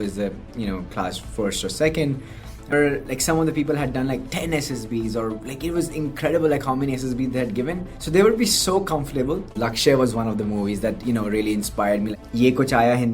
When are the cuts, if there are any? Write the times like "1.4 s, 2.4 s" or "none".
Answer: 2.7 s, 9.5 s, 12.1 s